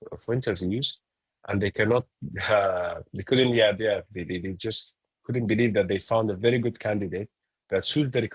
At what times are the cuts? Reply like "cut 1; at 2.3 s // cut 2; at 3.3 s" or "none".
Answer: none